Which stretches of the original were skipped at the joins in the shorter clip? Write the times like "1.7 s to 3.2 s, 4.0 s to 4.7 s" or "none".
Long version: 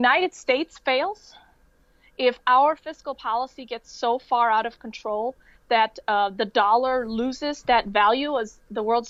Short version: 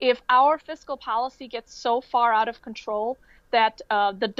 none